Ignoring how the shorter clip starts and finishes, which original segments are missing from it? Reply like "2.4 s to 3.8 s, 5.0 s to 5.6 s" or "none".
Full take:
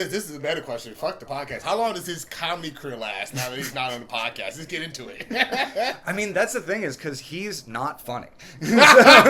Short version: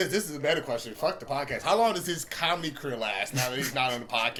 none